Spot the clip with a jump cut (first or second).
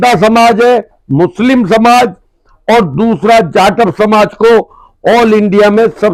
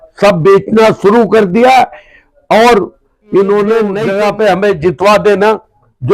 second